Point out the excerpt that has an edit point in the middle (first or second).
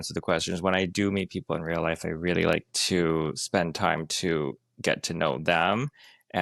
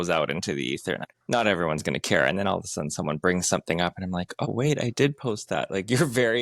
second